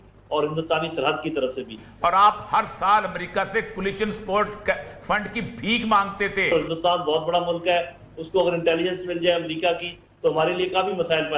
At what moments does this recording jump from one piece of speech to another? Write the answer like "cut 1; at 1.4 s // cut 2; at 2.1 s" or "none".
cut 1; at 1.8 s // cut 2; at 6.5 s